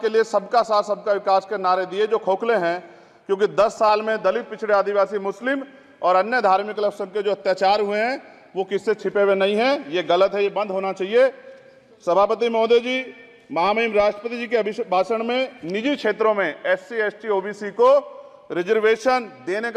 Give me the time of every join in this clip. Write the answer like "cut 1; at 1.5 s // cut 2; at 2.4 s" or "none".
none